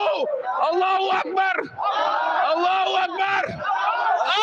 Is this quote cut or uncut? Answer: uncut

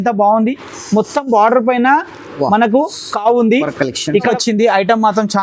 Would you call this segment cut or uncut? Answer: cut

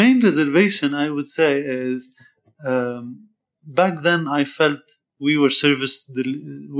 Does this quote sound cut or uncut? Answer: uncut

